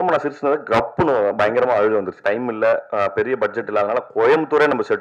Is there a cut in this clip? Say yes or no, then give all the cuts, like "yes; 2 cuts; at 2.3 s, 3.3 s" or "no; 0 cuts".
yes; 1 cut; at 2.2 s